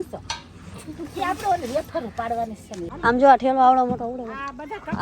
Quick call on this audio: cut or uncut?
cut